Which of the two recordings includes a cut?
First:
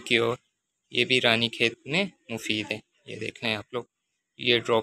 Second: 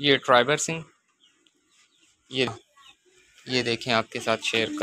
second; 1 cut; at 2.5 s

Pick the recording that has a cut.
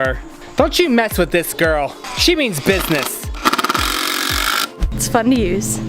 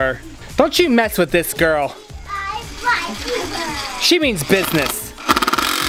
first; 2 cuts; at 2.1 s, 5.0 s

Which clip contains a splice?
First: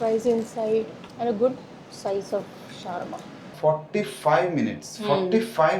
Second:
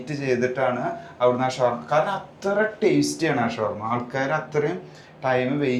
first; 2 cuts; at 1.0 s, 3.5 s

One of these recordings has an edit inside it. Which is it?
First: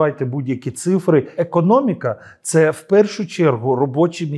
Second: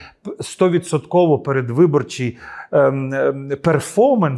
first; 1 cut; at 1.4 s

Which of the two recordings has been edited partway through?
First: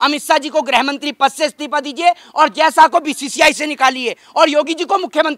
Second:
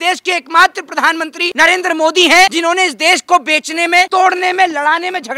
second; 3 cuts; at 1.4 s, 2.5 s, 4.1 s

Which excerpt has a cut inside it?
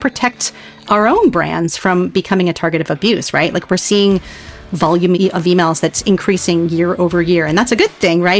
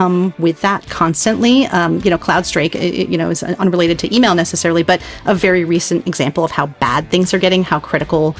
first; 1 cut; at 5.2 s

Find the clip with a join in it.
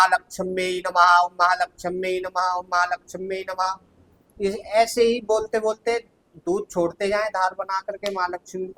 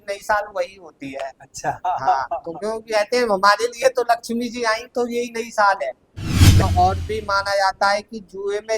second; 1 cut; at 6.6 s

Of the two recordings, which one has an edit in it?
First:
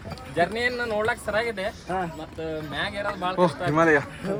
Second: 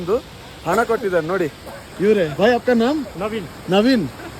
second; 2 cuts; at 2.3 s, 3.1 s

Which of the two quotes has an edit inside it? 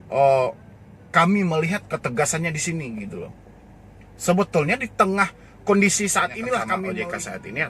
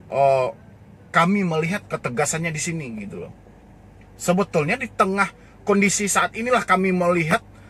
first; 1 cut; at 6.8 s

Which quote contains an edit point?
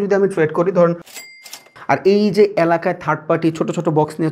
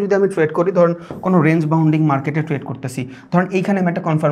first; 1 cut; at 1.3 s

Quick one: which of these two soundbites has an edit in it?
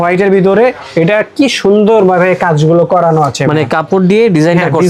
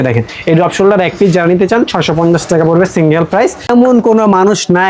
second; 1 cut; at 3.7 s

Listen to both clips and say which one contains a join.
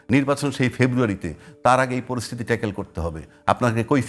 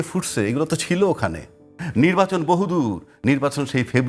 second; 1 cut; at 1.8 s

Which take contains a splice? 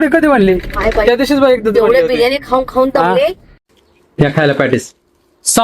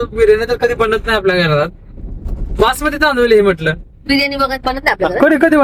first; 1 cut; at 3.5 s

